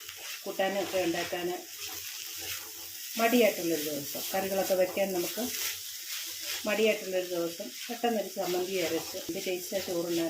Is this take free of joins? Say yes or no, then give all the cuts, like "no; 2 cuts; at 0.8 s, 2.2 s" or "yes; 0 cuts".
no; 1 cut; at 9.3 s